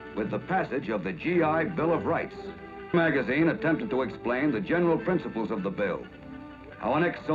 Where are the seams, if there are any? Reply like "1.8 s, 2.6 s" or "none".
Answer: 2.9 s